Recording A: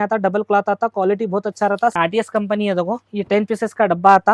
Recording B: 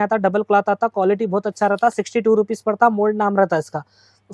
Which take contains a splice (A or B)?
A